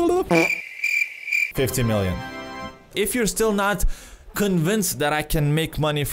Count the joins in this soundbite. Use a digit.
1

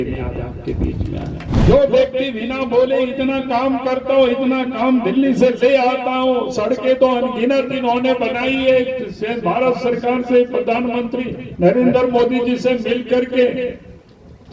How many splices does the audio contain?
1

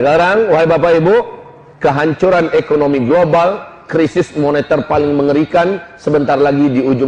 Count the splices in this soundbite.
0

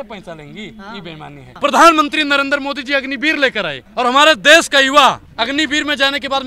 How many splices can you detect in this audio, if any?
3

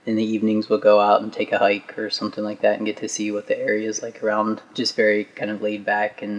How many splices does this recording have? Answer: 1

